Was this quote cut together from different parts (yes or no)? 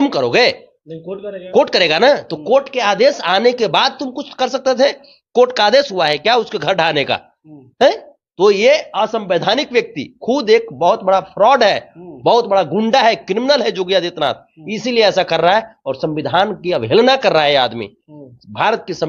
no